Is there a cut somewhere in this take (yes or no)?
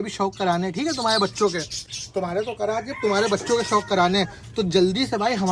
no